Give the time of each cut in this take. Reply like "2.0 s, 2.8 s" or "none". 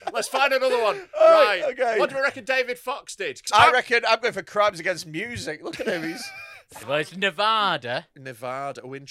3.4 s, 6.9 s